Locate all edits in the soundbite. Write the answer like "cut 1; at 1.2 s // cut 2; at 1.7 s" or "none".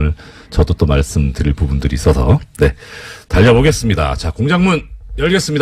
cut 1; at 3.0 s